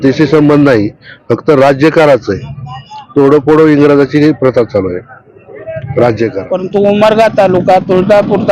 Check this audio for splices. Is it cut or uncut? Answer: cut